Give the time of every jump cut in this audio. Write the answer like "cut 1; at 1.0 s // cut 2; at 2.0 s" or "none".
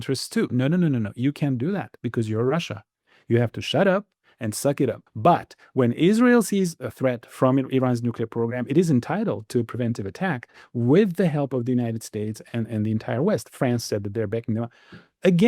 cut 1; at 5.1 s // cut 2; at 6.8 s